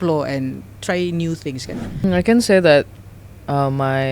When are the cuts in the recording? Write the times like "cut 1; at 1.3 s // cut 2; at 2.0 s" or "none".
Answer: cut 1; at 2.0 s